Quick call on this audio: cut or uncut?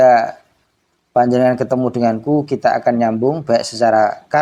uncut